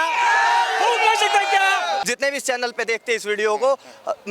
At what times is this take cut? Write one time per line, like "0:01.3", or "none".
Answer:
0:02.0